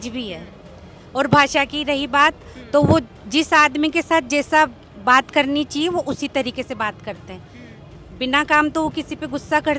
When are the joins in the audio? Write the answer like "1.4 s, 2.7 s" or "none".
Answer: none